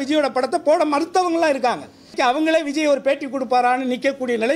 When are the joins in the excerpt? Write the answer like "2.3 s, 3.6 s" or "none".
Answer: 2.1 s